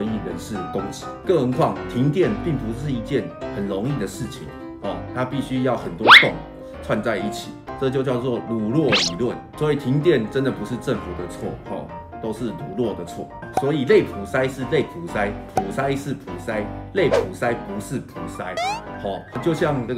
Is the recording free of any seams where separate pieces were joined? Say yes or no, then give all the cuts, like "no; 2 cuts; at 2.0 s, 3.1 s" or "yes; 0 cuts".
no; 3 cuts; at 1.2 s, 7.7 s, 13.4 s